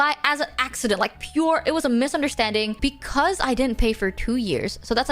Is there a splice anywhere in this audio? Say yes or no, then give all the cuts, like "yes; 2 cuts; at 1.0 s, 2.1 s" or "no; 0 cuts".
yes; 1 cut; at 2.8 s